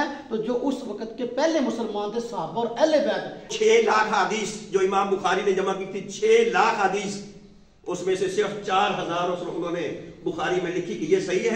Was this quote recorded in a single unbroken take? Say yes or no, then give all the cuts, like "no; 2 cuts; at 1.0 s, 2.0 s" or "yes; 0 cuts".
no; 1 cut; at 3.5 s